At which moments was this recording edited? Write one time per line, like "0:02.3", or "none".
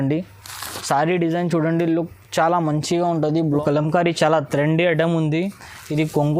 0:03.6